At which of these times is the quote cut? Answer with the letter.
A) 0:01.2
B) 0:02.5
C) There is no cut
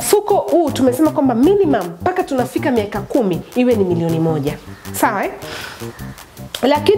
C